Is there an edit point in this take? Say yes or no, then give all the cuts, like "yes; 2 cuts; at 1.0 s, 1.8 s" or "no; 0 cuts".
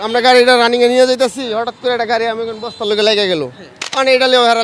no; 0 cuts